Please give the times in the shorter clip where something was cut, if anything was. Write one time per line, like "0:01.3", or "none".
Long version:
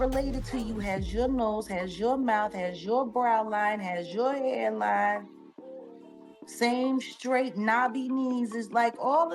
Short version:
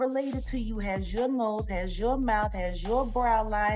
none